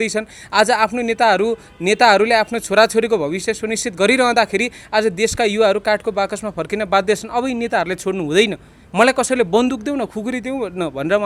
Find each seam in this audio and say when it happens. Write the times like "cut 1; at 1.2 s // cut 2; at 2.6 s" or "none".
none